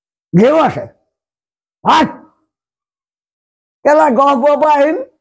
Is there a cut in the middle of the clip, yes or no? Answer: no